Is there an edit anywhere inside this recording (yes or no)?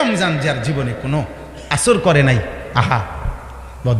no